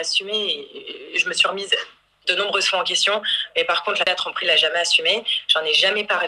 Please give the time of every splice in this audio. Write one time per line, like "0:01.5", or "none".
none